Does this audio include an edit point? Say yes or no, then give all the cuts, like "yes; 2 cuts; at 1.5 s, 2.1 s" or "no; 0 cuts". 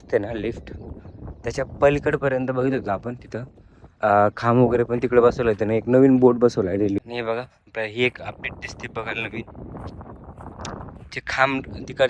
yes; 1 cut; at 7.0 s